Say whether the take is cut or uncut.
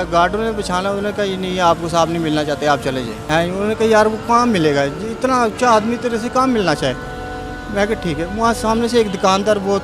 cut